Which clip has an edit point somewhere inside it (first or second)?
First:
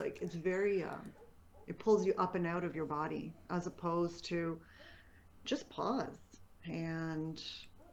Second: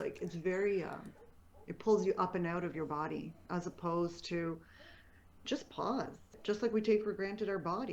second